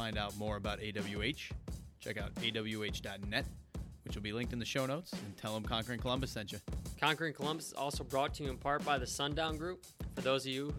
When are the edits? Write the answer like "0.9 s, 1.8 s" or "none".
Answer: 6.8 s